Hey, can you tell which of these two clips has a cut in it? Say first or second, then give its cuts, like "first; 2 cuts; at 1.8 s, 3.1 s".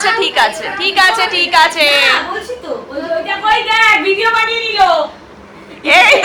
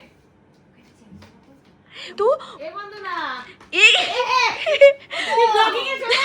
second; 1 cut; at 2.1 s